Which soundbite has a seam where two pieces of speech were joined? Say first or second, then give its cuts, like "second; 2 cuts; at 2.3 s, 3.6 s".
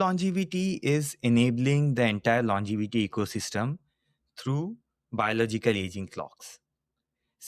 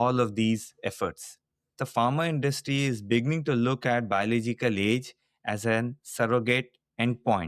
second; 1 cut; at 1.7 s